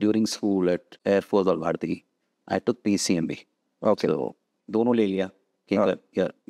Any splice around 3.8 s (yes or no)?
no